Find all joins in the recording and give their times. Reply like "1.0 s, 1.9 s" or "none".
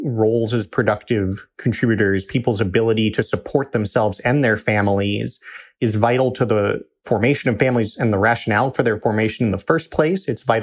none